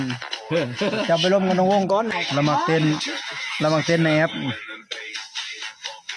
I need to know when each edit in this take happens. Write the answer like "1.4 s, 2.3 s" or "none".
2.1 s